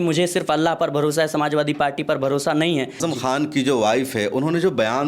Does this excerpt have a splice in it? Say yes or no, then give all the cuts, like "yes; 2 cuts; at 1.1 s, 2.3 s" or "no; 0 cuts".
yes; 1 cut; at 3.0 s